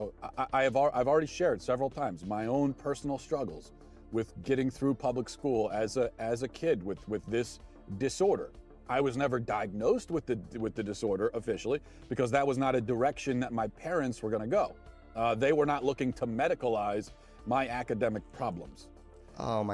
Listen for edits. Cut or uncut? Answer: uncut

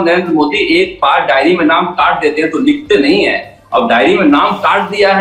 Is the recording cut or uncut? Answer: uncut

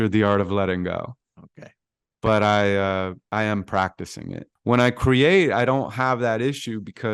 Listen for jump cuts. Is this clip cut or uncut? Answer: cut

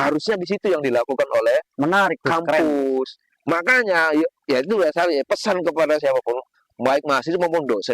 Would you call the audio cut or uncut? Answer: uncut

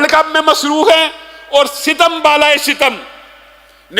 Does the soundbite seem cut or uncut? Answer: uncut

